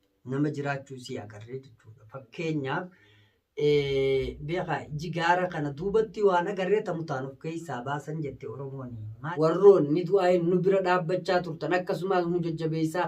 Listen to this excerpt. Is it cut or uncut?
cut